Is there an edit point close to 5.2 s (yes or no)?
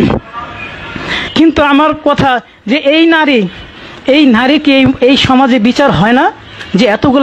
no